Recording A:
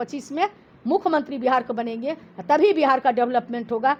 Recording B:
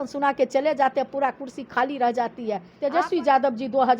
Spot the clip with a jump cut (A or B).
B